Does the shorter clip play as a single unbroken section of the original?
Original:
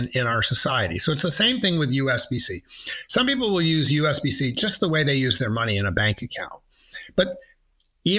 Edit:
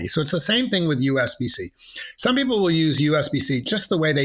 yes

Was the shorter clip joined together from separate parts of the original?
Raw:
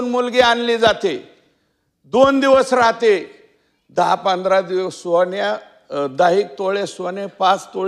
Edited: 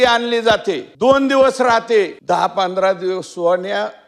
yes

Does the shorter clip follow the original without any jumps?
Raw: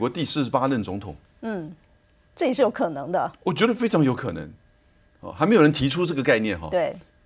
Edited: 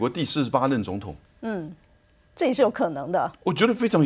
yes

